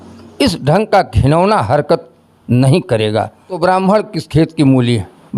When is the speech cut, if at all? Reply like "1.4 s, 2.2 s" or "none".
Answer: 3.6 s